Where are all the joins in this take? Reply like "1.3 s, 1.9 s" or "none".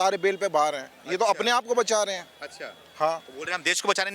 none